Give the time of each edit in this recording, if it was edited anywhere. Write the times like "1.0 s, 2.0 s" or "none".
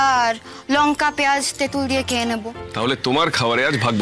2.6 s